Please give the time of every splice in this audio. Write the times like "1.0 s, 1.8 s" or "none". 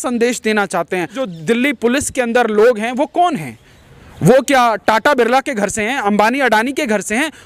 1.2 s